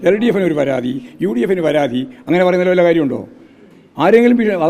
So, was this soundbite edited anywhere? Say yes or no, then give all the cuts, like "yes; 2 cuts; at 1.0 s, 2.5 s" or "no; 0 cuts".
no; 0 cuts